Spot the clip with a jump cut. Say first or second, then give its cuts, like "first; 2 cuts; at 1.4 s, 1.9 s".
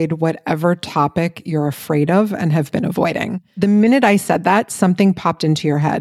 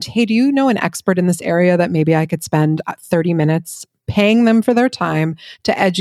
first; 1 cut; at 3.6 s